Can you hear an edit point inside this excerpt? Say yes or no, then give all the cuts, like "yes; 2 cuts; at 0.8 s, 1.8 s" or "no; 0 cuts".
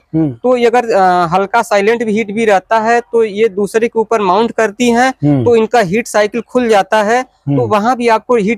no; 0 cuts